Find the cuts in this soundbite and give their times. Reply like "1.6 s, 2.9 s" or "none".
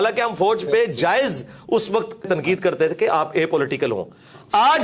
2.3 s

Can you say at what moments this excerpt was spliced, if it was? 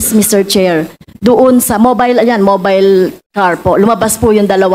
none

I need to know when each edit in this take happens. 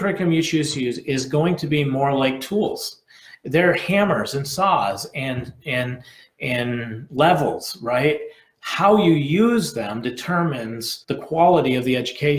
10.9 s

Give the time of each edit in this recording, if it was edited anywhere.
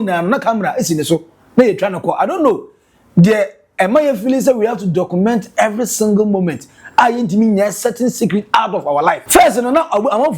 9.2 s

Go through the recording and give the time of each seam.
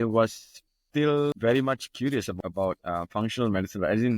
1.2 s, 2.3 s

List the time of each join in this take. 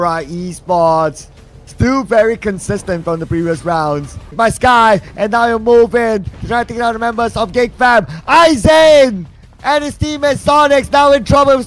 4.4 s

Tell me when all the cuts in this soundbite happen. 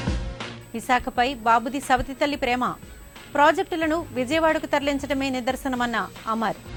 none

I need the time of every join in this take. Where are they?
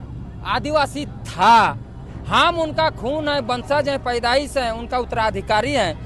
none

